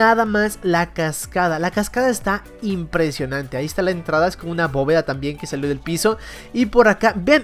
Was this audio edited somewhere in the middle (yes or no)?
no